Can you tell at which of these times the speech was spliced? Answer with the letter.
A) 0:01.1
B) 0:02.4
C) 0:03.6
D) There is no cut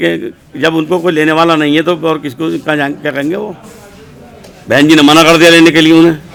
D